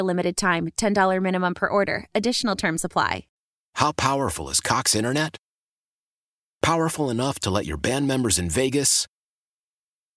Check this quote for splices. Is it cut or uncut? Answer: cut